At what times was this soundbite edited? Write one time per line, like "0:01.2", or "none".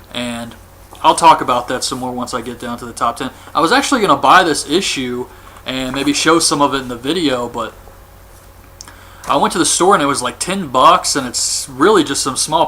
0:03.4